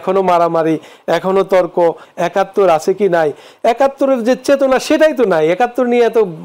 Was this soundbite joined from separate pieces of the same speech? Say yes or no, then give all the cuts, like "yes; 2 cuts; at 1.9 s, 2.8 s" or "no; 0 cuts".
yes; 1 cut; at 2.1 s